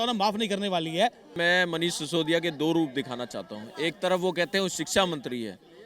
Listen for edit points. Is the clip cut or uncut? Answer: cut